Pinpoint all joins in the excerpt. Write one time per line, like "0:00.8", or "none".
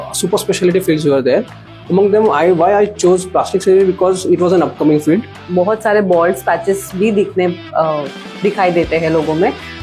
0:05.3